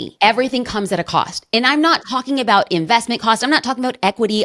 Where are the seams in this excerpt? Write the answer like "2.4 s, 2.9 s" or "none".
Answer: none